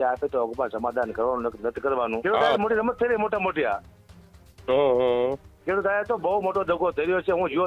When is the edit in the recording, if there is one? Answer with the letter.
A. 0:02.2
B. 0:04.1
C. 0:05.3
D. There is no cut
A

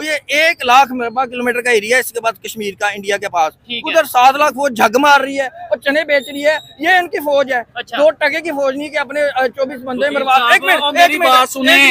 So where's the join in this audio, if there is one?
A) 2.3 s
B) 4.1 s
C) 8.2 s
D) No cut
D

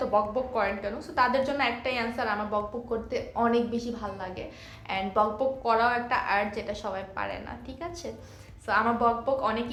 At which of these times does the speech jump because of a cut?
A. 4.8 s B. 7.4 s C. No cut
C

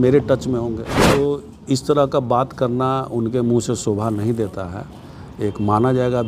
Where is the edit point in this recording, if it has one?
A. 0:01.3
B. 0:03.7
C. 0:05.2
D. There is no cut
A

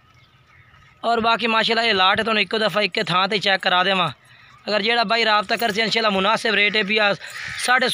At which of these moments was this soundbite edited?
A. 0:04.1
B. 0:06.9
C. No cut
C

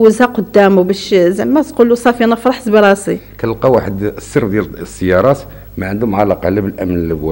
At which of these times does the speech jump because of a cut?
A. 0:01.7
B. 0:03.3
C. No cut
B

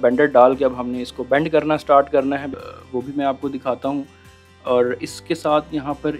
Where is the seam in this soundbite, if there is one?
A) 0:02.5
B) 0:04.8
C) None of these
A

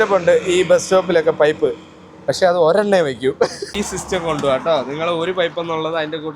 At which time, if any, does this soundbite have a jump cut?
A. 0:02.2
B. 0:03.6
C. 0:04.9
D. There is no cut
B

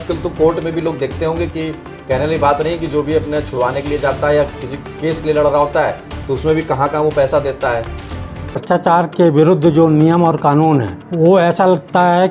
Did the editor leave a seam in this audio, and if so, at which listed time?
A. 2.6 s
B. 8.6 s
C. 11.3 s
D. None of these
B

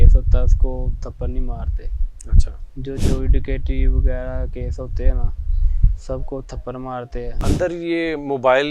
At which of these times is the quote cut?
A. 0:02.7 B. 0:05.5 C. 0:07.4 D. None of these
C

